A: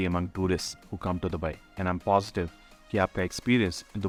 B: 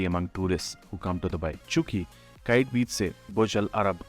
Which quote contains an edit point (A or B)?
B